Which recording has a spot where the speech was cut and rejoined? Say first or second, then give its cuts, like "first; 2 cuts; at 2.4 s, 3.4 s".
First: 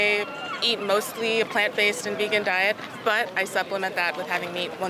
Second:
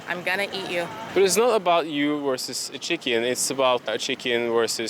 second; 2 cuts; at 1.0 s, 3.9 s